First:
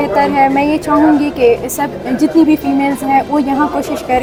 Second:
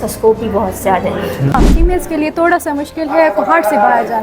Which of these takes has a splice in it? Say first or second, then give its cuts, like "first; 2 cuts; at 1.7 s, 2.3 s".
second; 1 cut; at 1.5 s